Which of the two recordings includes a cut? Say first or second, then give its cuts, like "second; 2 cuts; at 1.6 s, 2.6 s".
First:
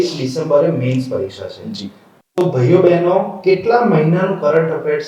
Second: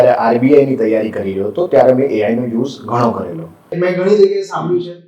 second; 1 cut; at 3.7 s